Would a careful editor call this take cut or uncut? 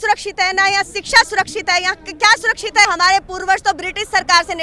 cut